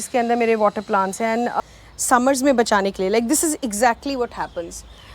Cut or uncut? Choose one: cut